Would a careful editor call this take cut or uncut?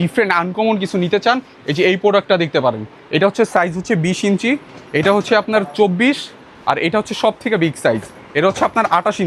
uncut